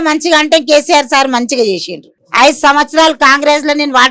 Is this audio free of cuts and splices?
no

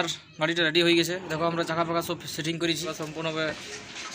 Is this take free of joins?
no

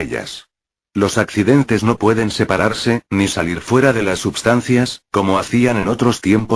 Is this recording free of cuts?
yes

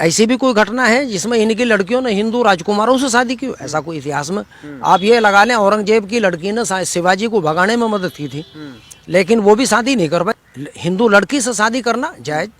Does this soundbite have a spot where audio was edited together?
yes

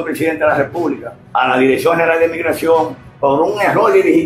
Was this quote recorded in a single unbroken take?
no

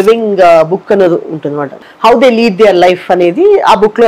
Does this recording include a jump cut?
yes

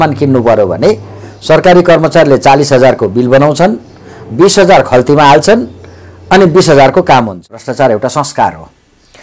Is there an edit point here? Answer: yes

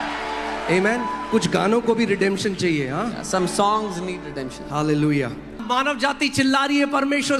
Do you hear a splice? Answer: yes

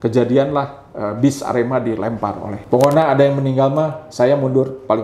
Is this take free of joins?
no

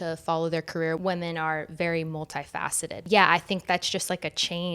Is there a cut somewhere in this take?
yes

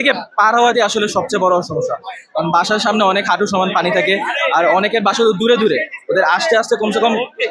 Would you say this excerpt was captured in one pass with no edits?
yes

